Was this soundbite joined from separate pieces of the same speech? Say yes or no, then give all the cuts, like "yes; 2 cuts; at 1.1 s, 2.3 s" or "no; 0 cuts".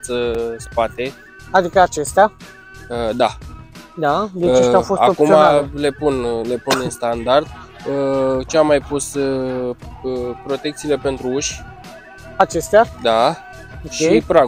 no; 0 cuts